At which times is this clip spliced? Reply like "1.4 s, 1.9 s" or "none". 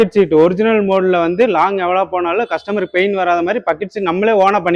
none